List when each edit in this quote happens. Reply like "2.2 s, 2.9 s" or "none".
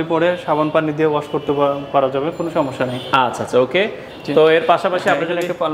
none